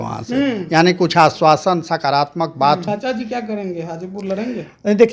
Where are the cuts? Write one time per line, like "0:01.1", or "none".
0:02.8